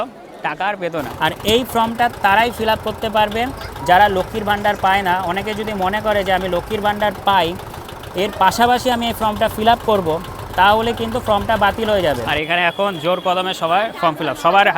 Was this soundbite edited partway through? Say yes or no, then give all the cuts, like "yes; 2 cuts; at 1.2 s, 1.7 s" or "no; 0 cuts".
yes; 2 cuts; at 1.1 s, 12.3 s